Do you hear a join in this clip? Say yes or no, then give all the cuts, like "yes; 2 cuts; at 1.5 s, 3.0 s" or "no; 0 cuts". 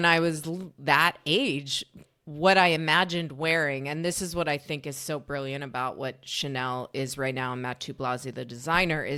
no; 0 cuts